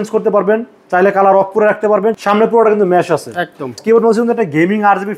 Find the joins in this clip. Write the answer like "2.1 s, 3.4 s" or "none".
2.2 s, 3.8 s

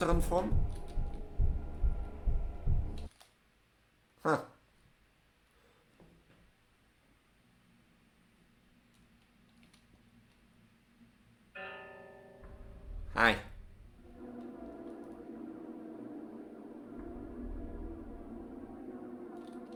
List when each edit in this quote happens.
none

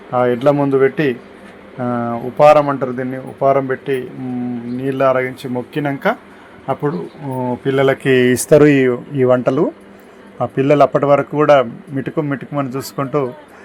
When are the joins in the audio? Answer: none

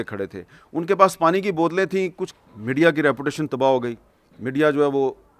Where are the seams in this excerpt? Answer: 2.2 s

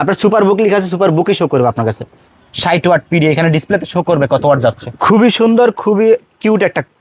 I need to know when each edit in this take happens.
2.1 s, 4.9 s

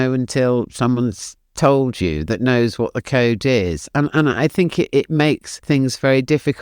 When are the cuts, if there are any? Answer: 5.5 s

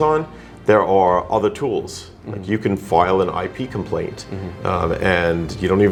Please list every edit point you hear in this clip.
none

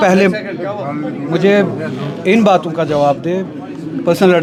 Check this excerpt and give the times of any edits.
none

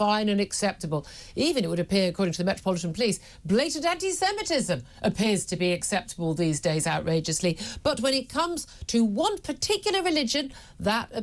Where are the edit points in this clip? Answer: none

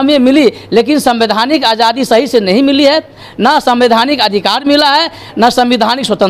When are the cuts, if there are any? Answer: none

